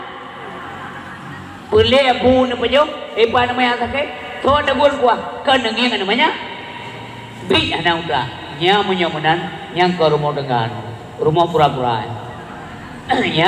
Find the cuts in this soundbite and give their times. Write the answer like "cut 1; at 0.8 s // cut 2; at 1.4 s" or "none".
none